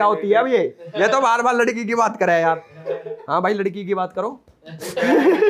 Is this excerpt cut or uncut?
uncut